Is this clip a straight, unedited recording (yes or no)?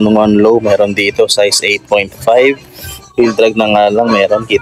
yes